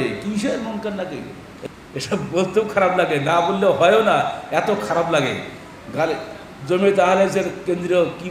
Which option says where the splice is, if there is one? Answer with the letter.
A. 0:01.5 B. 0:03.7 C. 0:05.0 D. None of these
A